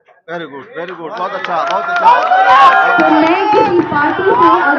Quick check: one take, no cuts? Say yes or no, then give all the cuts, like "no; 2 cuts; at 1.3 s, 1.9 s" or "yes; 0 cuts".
yes; 0 cuts